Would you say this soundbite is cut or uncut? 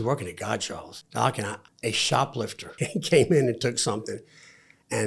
cut